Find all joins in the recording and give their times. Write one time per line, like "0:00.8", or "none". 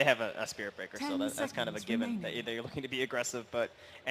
0:02.6